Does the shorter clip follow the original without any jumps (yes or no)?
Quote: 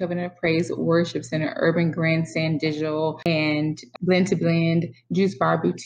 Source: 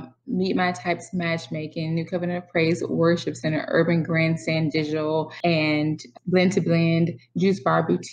no